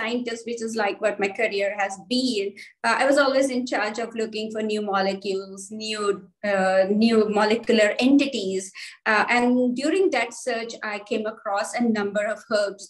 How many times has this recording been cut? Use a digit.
0